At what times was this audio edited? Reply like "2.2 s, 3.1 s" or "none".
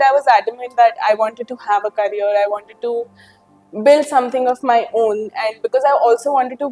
none